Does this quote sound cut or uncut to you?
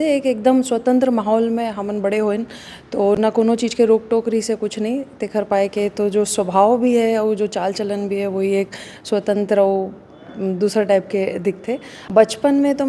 uncut